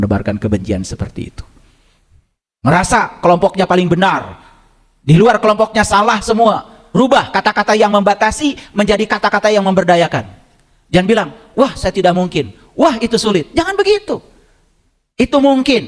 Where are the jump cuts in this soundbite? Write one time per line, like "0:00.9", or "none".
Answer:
0:06.7